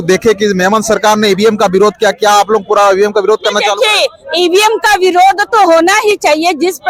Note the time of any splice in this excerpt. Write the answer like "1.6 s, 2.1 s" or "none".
none